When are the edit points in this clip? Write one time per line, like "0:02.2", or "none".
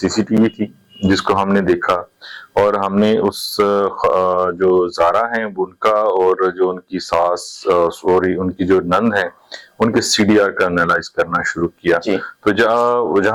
none